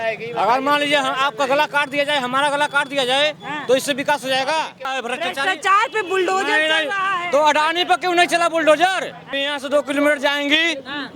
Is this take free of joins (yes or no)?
no